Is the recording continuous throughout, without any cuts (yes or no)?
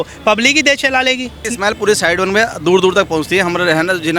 no